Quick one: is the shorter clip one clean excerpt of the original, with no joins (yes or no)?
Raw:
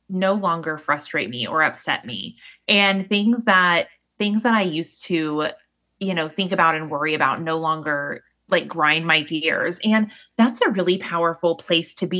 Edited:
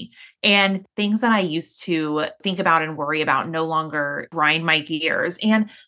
no